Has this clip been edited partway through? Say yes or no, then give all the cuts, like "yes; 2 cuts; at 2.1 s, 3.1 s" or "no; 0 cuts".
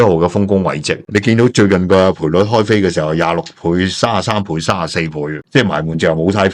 yes; 1 cut; at 0.9 s